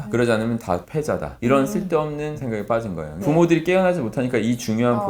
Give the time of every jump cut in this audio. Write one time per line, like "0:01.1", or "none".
none